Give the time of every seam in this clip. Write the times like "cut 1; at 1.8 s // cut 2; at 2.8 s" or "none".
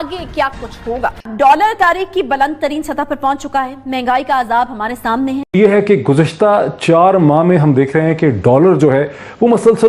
cut 1; at 1.2 s // cut 2; at 5.5 s